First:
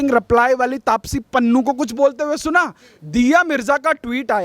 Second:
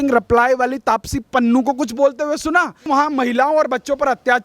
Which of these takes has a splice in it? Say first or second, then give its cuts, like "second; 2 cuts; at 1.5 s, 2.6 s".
second; 1 cut; at 2.8 s